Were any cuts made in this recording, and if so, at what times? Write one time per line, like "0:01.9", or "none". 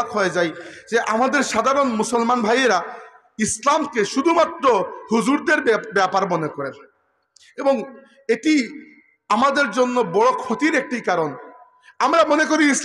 none